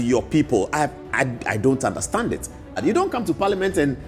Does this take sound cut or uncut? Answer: cut